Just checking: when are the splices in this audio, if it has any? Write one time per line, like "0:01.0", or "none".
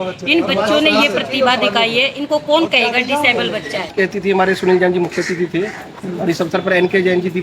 0:03.9

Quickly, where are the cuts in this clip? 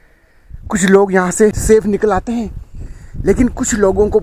0:01.6

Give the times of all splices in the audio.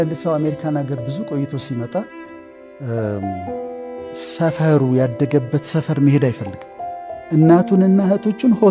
none

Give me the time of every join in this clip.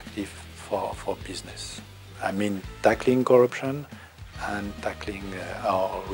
none

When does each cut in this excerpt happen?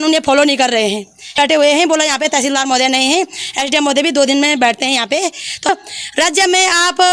0:01.4
0:05.7

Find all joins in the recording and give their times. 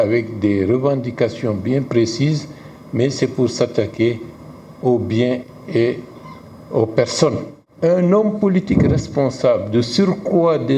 0:07.6

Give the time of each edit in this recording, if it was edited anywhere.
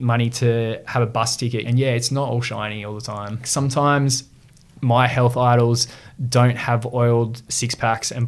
0:01.6
0:03.5

